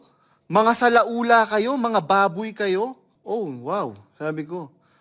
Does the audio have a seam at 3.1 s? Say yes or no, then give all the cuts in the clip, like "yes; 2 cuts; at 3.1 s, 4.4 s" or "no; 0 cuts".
yes; 1 cut; at 3.1 s